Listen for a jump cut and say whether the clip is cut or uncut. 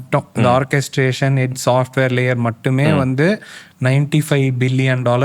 uncut